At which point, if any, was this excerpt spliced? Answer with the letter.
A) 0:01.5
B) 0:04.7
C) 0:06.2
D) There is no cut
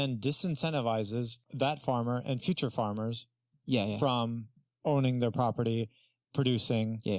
A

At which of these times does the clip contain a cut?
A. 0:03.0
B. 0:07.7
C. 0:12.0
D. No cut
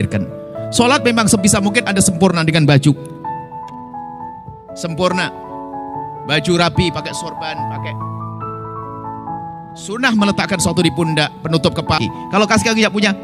C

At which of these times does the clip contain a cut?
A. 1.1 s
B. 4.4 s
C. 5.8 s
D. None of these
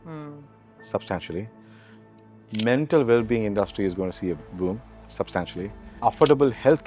B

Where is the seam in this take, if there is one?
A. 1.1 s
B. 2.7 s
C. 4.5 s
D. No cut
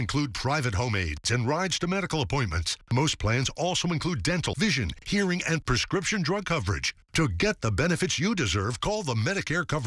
C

